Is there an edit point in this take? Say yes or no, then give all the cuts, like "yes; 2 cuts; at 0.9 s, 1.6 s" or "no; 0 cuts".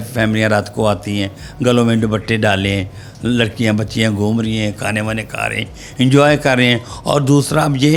no; 0 cuts